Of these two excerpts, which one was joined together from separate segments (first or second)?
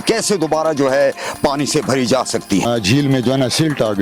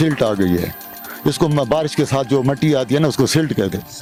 first